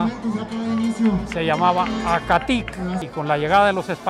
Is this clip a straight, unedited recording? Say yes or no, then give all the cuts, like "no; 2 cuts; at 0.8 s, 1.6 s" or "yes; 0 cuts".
no; 1 cut; at 3.0 s